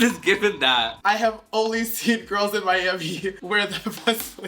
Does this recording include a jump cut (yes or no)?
yes